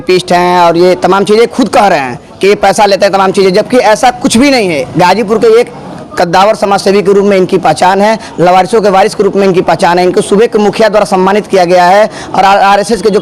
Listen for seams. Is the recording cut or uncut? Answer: uncut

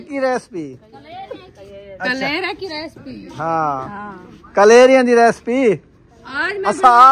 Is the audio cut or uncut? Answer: uncut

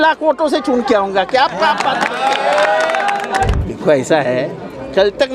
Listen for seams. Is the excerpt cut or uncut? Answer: cut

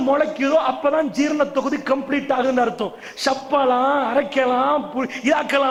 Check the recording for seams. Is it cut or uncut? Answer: uncut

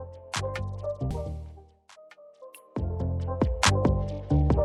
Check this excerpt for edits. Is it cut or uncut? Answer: uncut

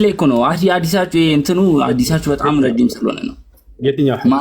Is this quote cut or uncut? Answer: uncut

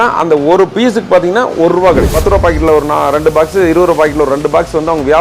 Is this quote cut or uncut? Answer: cut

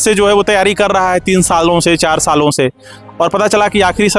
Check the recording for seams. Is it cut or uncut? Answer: uncut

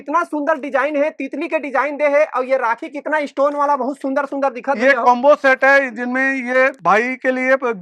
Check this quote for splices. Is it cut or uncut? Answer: uncut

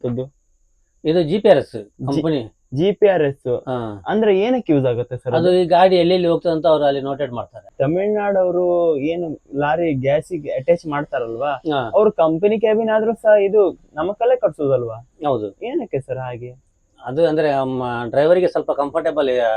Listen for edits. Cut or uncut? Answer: cut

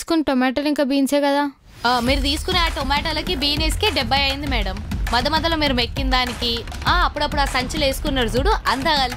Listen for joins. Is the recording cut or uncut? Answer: uncut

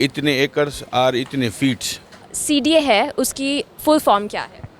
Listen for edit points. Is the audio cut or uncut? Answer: cut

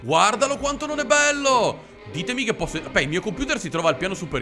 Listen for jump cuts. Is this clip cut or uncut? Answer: uncut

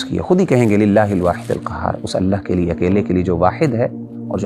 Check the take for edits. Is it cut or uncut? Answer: uncut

